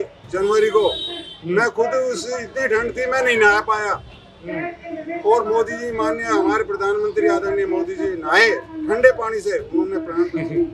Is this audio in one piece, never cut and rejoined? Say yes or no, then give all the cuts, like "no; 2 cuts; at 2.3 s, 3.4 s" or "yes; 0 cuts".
yes; 0 cuts